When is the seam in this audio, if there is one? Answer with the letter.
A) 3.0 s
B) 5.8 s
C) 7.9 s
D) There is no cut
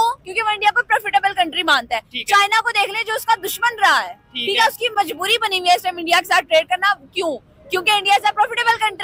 D